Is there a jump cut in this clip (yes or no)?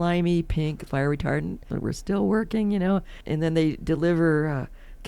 yes